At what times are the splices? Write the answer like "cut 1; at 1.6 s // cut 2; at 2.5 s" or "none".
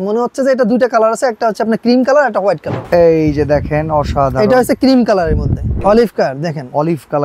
cut 1; at 2.8 s // cut 2; at 5.8 s

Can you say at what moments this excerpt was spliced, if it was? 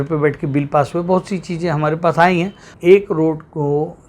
cut 1; at 2.6 s

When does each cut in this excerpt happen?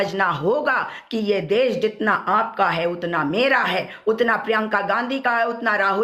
none

